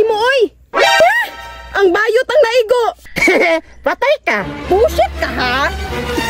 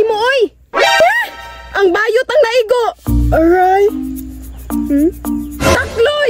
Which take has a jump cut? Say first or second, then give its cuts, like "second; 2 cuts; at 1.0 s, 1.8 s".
first; 1 cut; at 3.1 s